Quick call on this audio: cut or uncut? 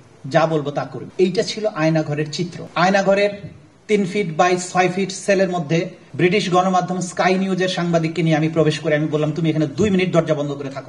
cut